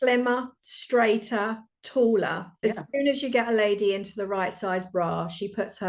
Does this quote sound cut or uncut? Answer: cut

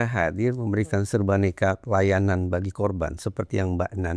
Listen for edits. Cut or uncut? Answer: uncut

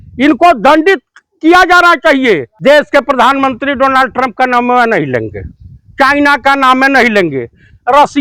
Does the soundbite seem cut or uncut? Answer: uncut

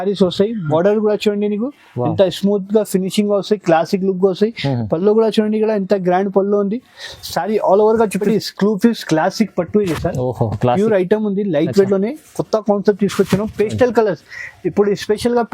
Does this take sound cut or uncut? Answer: cut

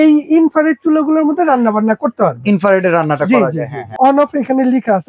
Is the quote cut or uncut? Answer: cut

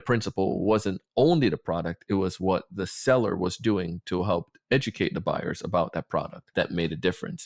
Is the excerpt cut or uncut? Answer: cut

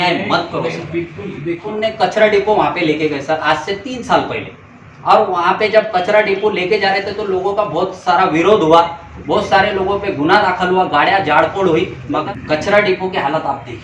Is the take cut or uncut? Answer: cut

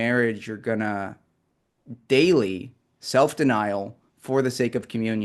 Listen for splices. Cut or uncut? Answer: uncut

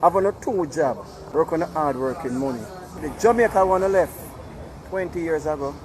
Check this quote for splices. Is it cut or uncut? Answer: cut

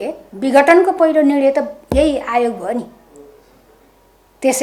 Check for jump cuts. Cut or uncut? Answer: uncut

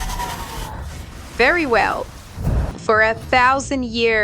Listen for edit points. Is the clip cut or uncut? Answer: cut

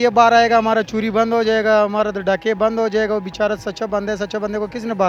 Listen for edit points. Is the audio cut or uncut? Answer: uncut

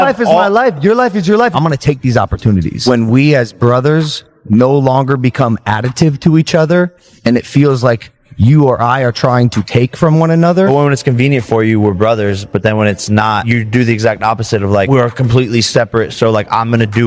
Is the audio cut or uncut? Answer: uncut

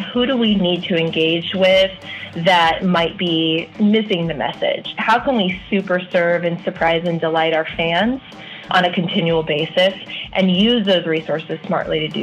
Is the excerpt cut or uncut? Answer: cut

